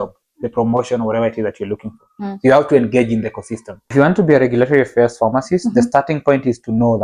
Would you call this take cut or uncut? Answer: cut